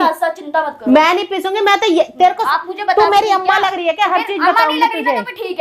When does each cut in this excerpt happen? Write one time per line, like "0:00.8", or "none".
0:02.4